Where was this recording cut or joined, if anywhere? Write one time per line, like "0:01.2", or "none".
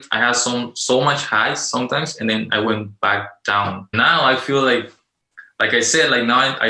0:03.9

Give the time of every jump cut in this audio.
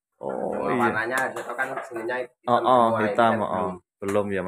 none

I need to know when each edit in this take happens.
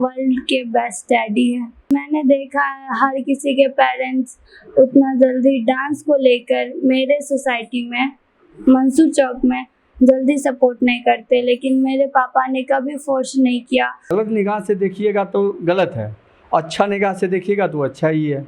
0:01.9
0:14.1

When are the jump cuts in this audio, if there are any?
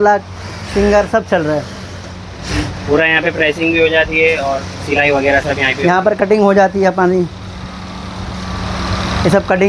none

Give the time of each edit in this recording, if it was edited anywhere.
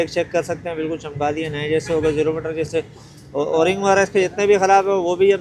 none

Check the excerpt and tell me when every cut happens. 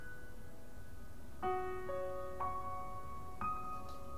0:02.4

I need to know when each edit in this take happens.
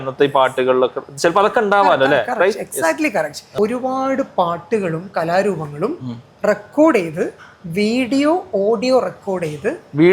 0:03.4

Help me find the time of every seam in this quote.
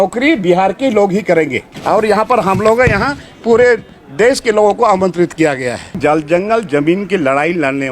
0:01.7
0:06.0

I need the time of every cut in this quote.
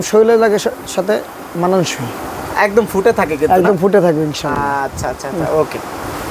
none

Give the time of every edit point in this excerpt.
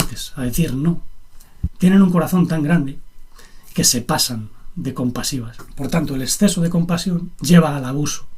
0:05.6
0:07.3

